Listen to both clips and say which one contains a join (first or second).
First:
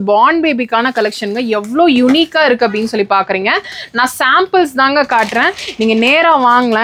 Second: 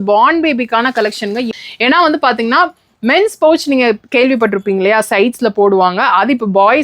second